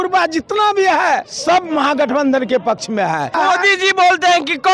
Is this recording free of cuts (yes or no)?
no